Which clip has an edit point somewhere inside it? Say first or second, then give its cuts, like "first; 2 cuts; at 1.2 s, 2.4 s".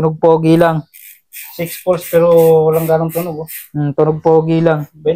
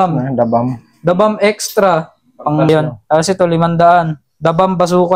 second; 1 cut; at 2.7 s